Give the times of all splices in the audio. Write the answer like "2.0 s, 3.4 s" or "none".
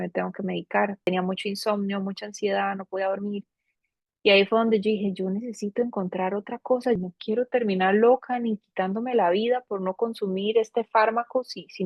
1.1 s, 7.0 s